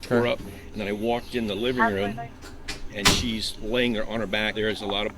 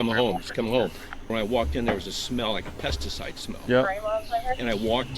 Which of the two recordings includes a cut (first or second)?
second